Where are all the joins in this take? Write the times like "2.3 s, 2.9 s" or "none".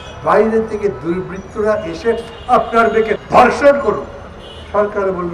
3.2 s